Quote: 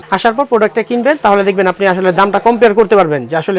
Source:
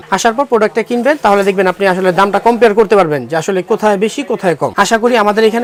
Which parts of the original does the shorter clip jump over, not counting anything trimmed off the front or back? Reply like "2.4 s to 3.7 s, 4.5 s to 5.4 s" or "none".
none